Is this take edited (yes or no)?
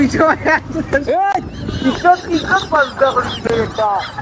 no